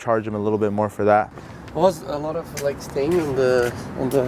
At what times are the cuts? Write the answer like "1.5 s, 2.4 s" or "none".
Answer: 1.3 s